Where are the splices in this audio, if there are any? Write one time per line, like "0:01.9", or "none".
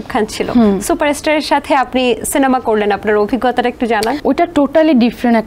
0:04.2